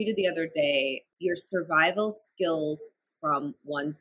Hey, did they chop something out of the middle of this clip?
yes; 1 cut; at 1.0 s

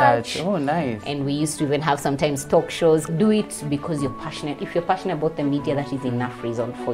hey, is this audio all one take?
no; 1 cut; at 3.1 s

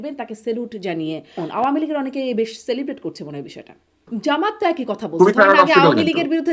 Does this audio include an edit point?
yes; 2 cuts; at 1.4 s, 4.0 s

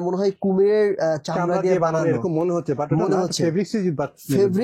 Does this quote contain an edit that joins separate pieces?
no; 0 cuts

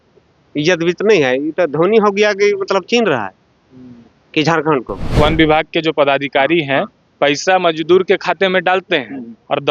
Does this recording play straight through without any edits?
no; 1 cut; at 5.1 s

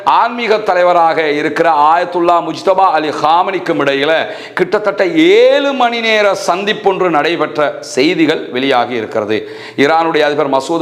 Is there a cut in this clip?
no; 0 cuts

